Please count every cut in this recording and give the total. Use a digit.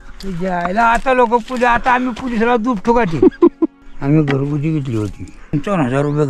2